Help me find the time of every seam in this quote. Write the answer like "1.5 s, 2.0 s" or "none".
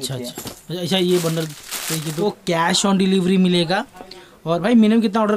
2.1 s